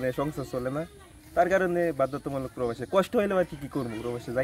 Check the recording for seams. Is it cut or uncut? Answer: uncut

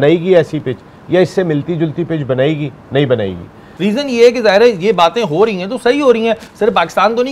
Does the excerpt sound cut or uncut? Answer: cut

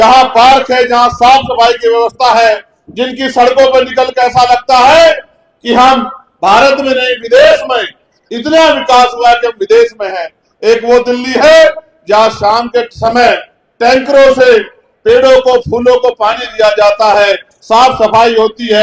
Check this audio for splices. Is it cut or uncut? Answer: uncut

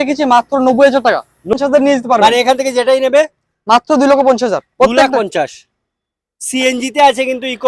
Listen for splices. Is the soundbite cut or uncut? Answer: cut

